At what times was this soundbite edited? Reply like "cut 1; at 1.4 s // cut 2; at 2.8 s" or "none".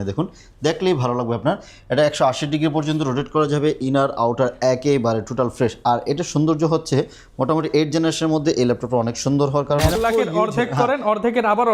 cut 1; at 10.0 s